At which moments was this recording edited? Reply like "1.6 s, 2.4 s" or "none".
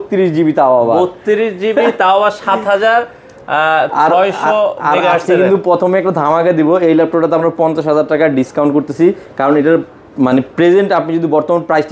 none